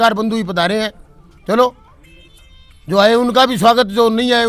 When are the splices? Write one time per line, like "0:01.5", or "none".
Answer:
none